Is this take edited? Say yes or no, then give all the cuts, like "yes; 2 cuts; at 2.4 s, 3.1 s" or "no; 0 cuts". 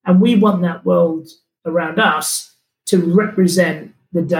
no; 0 cuts